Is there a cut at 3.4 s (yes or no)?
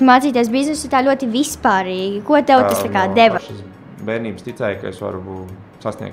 yes